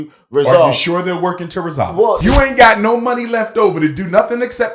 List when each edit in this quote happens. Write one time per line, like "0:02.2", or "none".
0:02.2